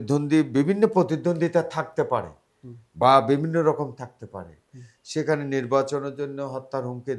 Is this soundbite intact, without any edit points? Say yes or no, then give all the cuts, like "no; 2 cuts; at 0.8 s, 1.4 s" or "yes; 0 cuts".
yes; 0 cuts